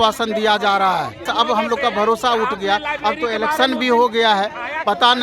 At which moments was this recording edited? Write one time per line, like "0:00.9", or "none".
0:01.3